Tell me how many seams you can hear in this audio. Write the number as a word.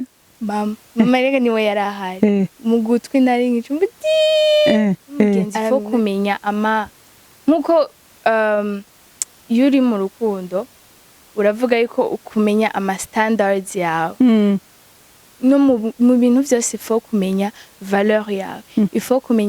one